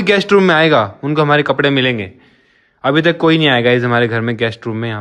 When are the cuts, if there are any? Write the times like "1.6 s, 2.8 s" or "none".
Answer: none